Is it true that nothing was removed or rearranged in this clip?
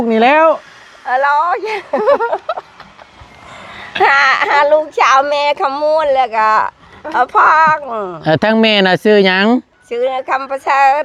yes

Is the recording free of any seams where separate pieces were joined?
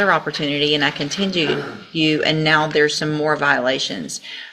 yes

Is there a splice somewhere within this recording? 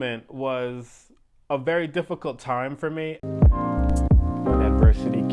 yes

